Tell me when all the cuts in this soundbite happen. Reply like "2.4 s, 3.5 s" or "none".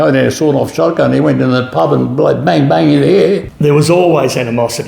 3.5 s